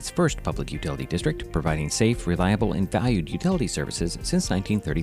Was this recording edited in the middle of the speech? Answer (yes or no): no